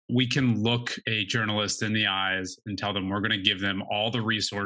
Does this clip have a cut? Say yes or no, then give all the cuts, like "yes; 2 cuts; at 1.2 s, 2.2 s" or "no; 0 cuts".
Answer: yes; 1 cut; at 1.0 s